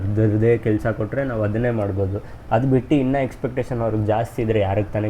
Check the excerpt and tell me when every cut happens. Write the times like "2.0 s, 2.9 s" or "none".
none